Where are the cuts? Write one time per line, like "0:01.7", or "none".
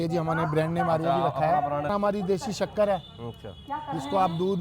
0:01.9